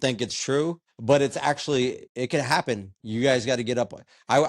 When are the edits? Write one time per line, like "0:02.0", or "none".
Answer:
0:00.9
0:02.0